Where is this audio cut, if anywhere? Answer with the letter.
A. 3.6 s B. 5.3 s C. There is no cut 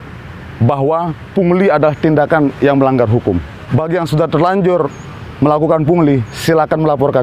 A